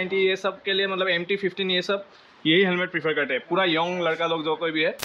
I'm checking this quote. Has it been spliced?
no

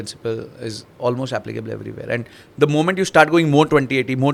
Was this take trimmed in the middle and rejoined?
no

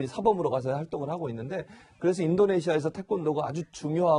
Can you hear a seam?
yes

